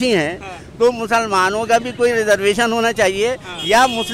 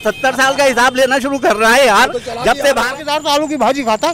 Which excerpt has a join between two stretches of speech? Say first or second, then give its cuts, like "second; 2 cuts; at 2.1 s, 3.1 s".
second; 1 cut; at 2.8 s